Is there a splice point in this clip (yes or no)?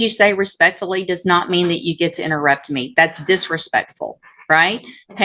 no